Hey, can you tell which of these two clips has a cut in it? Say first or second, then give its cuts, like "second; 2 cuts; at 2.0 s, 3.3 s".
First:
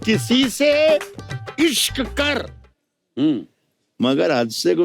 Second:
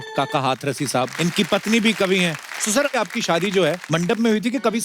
second; 3 cuts; at 1.1 s, 2.9 s, 3.8 s